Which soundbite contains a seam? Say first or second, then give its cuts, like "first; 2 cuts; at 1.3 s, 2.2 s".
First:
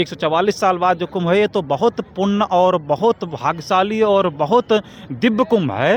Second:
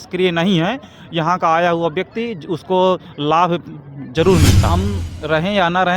second; 1 cut; at 4.6 s